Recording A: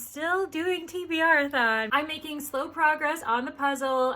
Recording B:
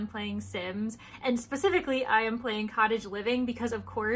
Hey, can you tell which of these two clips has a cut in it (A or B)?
A